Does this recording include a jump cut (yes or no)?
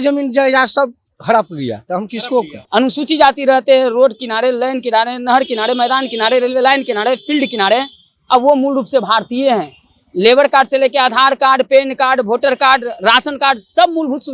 yes